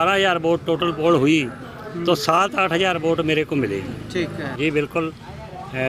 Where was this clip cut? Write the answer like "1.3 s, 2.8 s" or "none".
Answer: 4.5 s

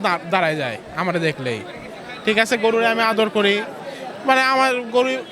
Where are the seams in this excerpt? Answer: none

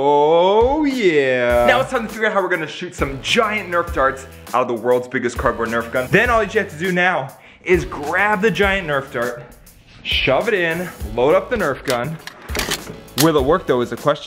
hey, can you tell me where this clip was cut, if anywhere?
1.7 s, 6.1 s, 13.1 s

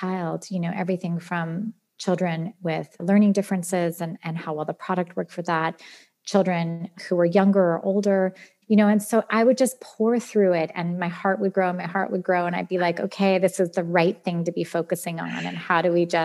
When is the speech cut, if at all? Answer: 8.5 s

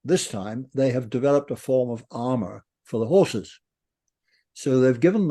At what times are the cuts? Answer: none

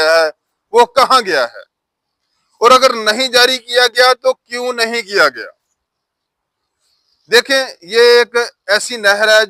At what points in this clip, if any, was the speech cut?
none

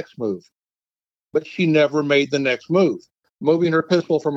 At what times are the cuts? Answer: 3.2 s

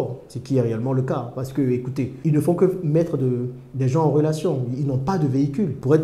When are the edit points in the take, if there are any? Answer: none

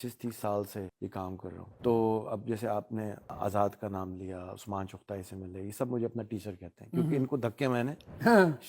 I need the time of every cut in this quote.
1.5 s, 3.3 s

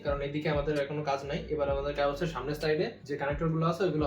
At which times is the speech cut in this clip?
3.0 s

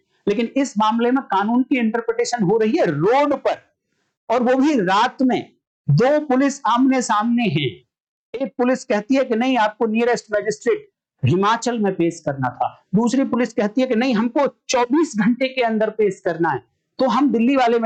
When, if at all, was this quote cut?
none

